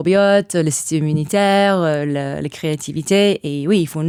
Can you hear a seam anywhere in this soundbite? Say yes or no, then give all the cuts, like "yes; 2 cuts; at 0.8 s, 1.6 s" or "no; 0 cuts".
no; 0 cuts